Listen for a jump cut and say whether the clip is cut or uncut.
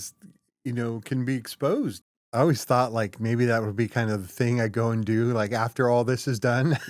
cut